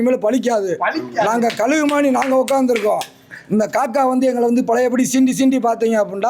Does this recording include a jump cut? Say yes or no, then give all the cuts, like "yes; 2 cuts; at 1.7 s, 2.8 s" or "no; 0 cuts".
no; 0 cuts